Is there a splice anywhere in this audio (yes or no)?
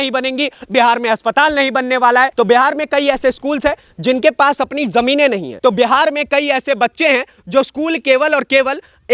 yes